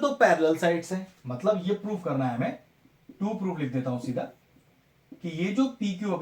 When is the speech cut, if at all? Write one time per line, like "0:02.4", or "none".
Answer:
none